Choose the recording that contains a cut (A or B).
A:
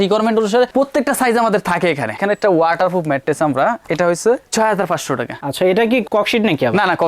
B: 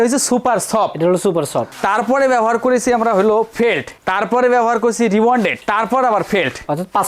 A